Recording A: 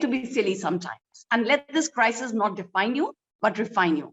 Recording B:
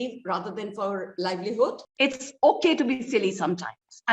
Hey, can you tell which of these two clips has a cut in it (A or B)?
B